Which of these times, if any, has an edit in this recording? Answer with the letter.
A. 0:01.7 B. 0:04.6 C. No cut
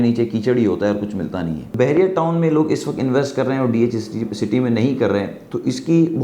A